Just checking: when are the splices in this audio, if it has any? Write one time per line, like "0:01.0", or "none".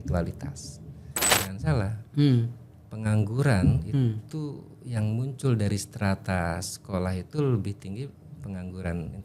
0:01.3

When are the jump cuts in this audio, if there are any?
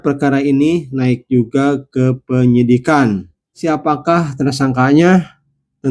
0:03.6

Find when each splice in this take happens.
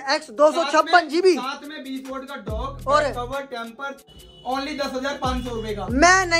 0:04.1

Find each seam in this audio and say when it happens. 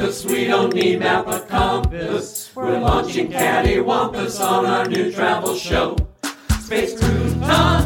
none

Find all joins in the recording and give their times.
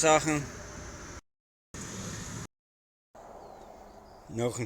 0:02.5

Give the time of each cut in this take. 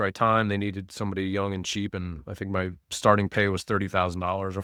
none

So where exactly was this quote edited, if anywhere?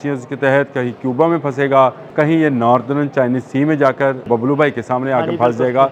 0:02.0
0:04.2

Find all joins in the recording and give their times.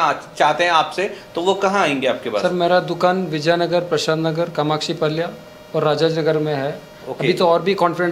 none

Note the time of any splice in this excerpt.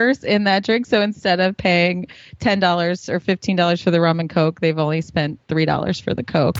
none

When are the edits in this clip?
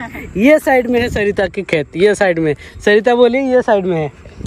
none

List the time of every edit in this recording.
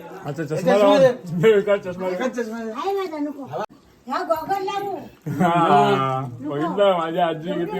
0:03.7

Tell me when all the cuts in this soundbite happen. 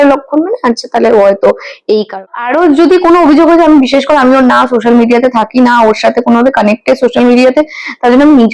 0:02.2

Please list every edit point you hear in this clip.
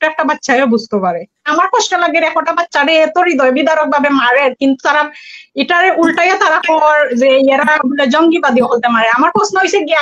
0:01.5

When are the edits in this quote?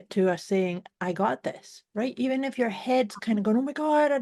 none

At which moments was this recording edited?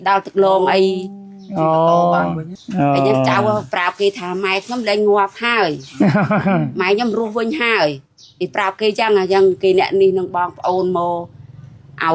0:02.5

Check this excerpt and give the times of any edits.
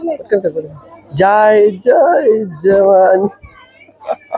none

